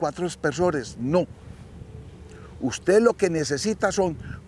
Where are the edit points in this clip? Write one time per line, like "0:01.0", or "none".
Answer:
none

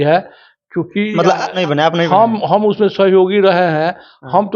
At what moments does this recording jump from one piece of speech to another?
0:01.6

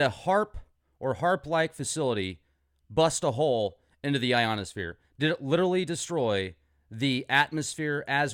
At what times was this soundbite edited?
none

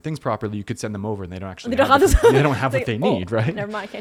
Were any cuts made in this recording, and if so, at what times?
none

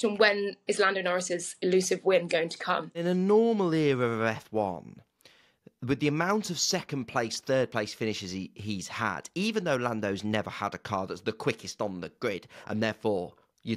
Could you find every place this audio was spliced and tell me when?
0:03.0

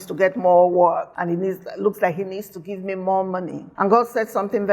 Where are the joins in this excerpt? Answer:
0:01.1
0:03.6

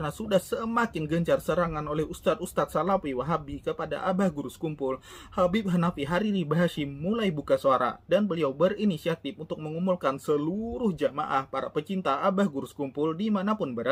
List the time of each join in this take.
none

